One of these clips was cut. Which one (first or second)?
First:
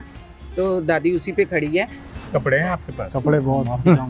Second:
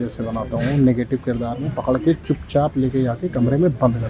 first